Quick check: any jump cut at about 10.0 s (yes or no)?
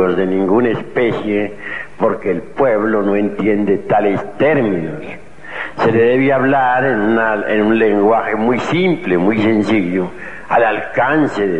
no